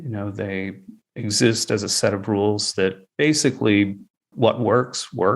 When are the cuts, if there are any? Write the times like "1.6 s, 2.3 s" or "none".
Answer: 0.9 s, 3.0 s, 4.2 s